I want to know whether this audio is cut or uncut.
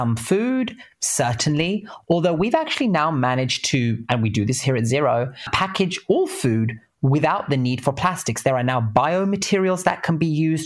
uncut